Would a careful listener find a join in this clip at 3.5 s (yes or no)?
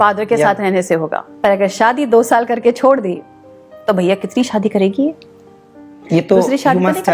no